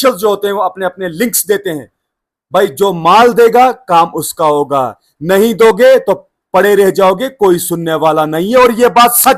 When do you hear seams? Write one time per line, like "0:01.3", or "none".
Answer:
none